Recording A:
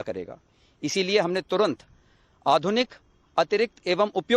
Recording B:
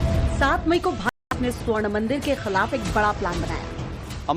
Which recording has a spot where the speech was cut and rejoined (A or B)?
B